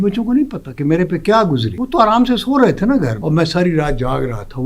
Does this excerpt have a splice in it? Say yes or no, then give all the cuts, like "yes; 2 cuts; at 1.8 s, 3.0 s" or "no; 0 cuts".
yes; 2 cuts; at 1.7 s, 3.2 s